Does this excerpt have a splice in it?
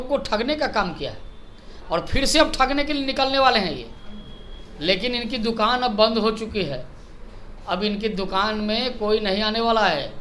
no; 0 cuts

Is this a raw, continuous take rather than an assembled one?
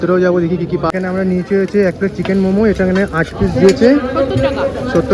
no; 1 cut; at 0.9 s

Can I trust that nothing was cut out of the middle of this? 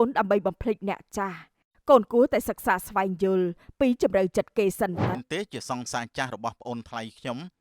no; 1 cut; at 5.2 s

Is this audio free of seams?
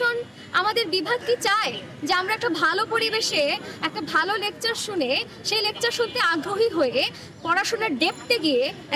yes; 0 cuts

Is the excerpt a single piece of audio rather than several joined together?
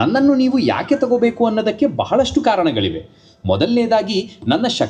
yes; 0 cuts

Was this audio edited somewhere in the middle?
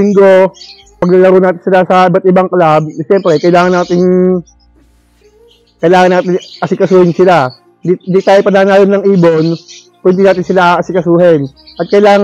yes; 1 cut; at 1.0 s

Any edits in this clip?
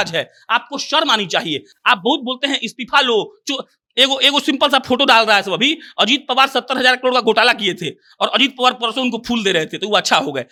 no; 0 cuts

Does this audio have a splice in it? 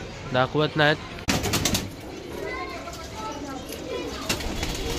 yes; 1 cut; at 1.2 s

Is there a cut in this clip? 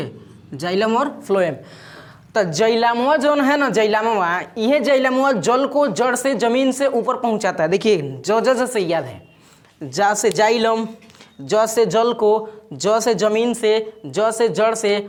no; 0 cuts

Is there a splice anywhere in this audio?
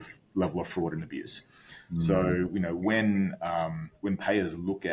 no; 0 cuts

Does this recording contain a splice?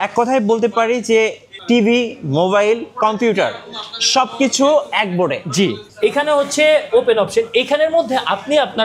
yes; 1 cut; at 5.8 s

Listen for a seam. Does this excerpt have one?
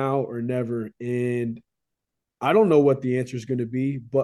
no; 0 cuts

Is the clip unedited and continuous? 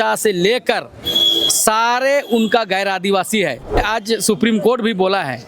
no; 1 cut; at 3.8 s

